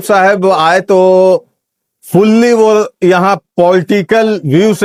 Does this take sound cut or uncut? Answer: uncut